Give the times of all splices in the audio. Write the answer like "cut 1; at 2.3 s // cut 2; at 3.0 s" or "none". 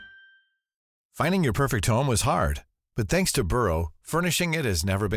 cut 1; at 1.0 s